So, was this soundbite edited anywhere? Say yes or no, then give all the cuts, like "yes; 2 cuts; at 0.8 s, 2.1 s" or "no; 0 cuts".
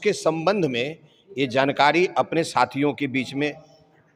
no; 0 cuts